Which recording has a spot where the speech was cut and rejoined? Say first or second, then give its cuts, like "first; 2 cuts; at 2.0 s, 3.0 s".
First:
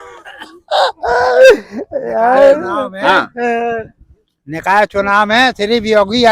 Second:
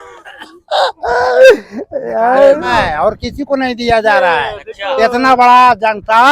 second; 1 cut; at 2.8 s